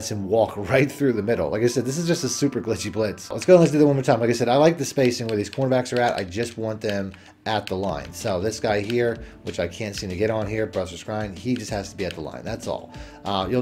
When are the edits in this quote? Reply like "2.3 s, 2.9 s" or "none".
none